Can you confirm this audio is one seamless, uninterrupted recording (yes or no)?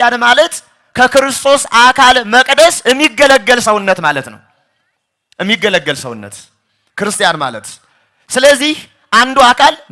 yes